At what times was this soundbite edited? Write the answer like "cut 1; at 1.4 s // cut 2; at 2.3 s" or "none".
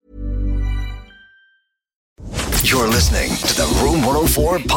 cut 1; at 2.2 s